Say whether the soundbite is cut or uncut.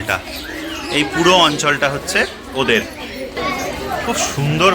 cut